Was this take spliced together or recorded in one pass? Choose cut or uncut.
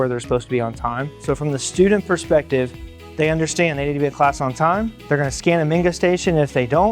cut